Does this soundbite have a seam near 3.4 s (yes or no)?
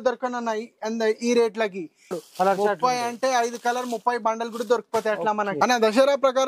no